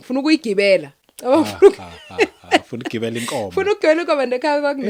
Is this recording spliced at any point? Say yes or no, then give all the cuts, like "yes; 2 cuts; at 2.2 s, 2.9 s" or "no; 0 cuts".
no; 0 cuts